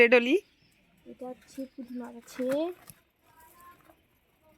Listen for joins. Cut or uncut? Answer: uncut